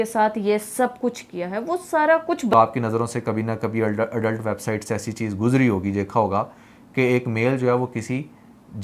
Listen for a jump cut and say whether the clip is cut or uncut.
cut